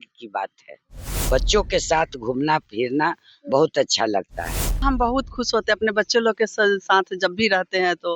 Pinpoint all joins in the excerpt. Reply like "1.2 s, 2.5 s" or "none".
1.1 s, 4.8 s